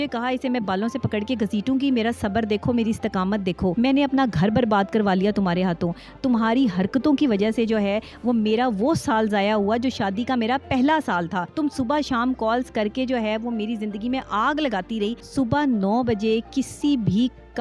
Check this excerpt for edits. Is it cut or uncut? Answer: cut